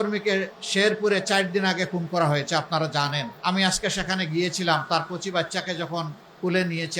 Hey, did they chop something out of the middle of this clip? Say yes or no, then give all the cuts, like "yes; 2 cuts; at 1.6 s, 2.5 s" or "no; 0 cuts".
yes; 1 cut; at 3.3 s